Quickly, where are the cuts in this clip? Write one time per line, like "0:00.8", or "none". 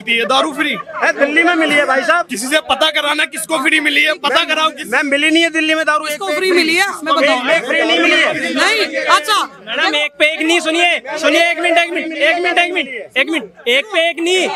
none